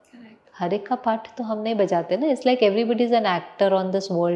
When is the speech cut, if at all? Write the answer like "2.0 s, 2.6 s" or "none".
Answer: none

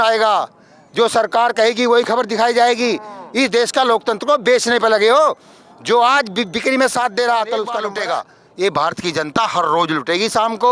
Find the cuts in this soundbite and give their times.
7.8 s

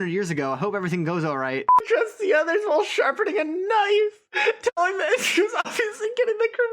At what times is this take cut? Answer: 1.8 s

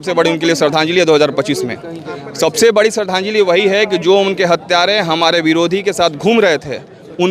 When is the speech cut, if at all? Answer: none

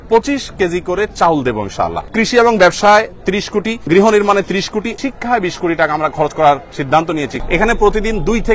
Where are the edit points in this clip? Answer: 2.1 s, 3.8 s, 4.9 s, 7.3 s

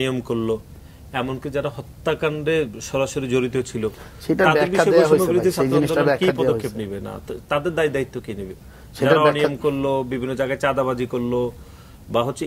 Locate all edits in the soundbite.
none

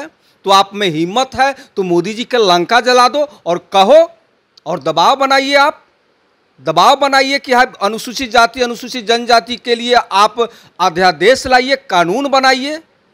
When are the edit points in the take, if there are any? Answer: none

